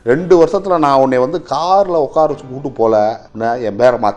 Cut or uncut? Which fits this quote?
cut